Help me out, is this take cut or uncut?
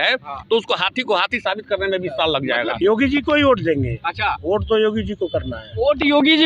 cut